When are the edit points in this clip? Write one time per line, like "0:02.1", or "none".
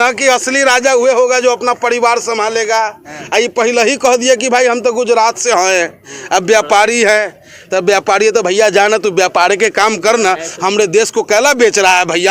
none